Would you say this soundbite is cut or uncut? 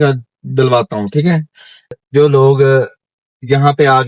cut